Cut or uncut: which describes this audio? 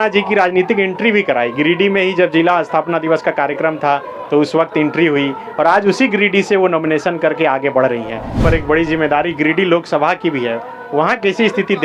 cut